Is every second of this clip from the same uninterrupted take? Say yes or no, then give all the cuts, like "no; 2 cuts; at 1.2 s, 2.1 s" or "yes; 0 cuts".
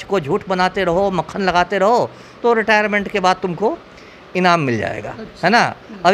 yes; 0 cuts